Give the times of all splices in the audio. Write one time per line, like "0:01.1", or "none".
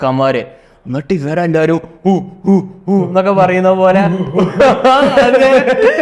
none